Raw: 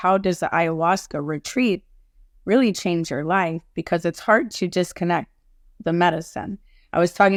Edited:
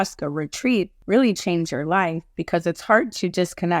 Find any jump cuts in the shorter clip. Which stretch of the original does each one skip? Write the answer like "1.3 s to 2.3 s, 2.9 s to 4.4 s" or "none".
1.9 s to 2.3 s